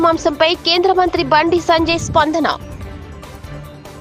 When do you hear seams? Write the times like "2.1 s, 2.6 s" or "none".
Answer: 2.8 s